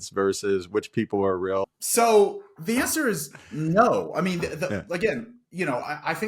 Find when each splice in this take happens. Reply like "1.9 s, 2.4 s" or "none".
1.7 s